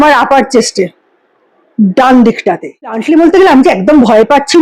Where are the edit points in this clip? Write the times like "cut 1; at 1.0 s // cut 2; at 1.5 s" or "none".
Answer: cut 1; at 3.0 s